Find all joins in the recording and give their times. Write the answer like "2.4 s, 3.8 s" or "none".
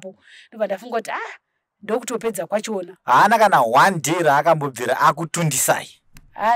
2.9 s